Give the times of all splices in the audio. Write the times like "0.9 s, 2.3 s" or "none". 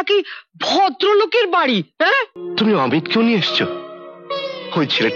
2.4 s

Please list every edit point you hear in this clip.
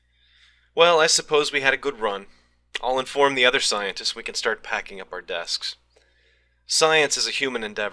5.1 s

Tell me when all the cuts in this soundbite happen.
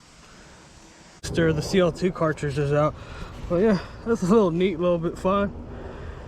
1.3 s

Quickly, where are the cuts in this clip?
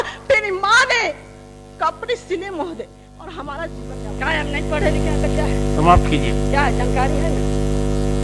3.9 s

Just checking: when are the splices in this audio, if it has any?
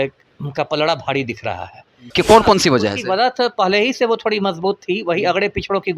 2.0 s

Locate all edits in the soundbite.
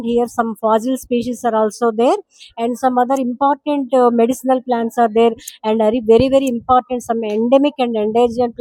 none

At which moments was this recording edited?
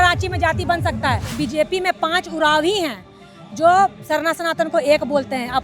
1.4 s

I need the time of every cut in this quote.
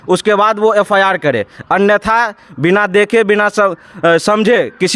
none

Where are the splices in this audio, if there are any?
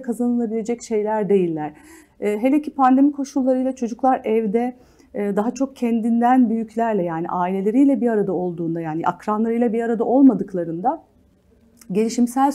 none

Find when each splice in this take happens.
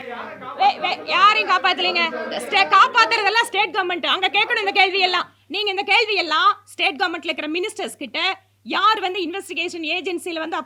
none

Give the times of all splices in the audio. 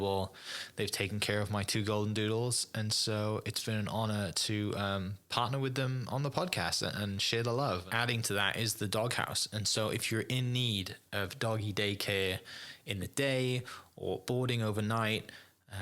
7.9 s

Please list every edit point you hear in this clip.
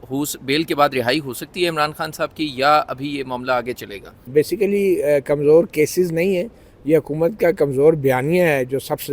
4.3 s

